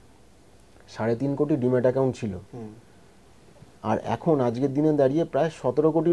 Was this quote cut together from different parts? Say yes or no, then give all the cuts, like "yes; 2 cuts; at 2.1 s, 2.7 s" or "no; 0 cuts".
no; 0 cuts